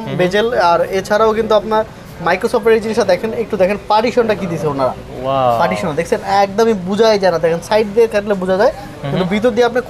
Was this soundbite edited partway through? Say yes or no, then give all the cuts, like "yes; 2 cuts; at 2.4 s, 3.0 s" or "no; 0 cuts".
no; 0 cuts